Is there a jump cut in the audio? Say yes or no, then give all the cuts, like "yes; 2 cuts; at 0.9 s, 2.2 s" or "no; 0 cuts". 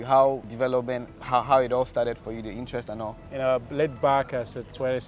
yes; 2 cuts; at 1.1 s, 3.3 s